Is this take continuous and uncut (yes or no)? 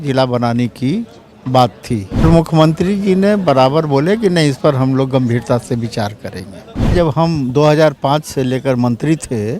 no